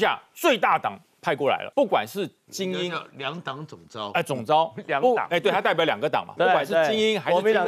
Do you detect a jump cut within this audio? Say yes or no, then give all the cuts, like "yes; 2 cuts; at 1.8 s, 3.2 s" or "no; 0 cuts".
yes; 1 cut; at 1.7 s